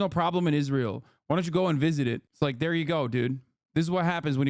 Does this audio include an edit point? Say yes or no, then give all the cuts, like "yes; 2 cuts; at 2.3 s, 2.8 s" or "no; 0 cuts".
no; 0 cuts